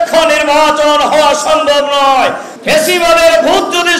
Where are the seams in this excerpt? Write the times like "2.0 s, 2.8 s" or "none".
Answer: 2.5 s